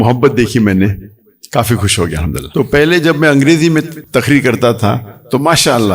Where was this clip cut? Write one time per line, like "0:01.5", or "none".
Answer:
0:02.4
0:04.0